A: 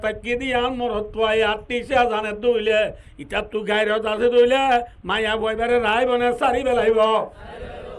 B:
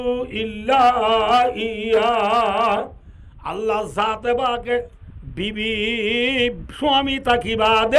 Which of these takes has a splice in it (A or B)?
B